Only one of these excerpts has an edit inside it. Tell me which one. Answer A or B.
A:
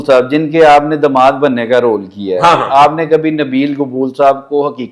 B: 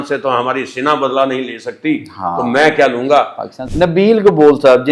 B